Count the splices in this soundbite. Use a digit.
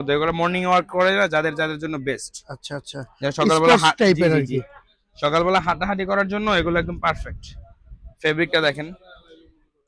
0